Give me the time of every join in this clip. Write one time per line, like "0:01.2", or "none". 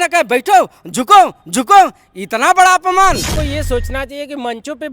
0:03.3

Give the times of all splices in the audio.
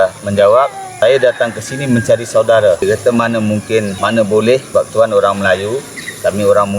0:01.0
0:02.8
0:03.9
0:04.7

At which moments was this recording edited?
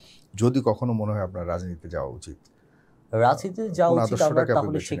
none

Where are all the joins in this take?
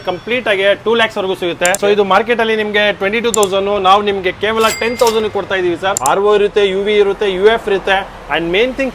0:01.8
0:06.0

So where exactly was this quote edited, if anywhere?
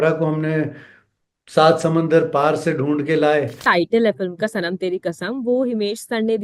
0:03.6

